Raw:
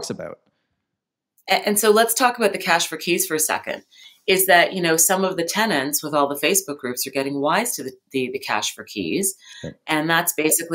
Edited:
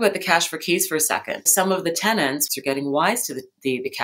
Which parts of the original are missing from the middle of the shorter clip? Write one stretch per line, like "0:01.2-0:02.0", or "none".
0:03.9-0:05.0
0:06.0-0:07.0